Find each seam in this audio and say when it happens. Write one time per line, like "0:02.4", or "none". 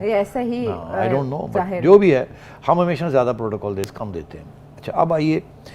none